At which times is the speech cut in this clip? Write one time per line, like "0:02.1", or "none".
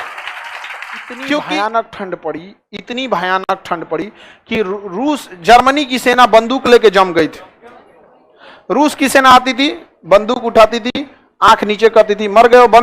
0:01.4